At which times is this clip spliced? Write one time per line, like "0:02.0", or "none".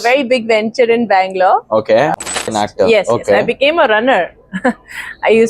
0:02.3